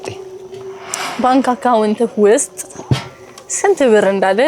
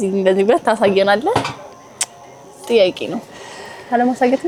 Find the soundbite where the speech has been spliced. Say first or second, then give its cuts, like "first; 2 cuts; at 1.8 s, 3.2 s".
first; 1 cut; at 1.0 s